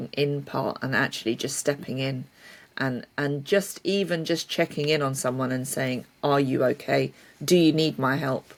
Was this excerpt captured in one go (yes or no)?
yes